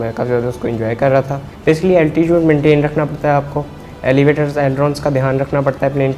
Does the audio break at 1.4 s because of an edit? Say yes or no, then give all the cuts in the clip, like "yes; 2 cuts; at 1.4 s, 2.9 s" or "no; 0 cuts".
yes; 1 cut; at 1.4 s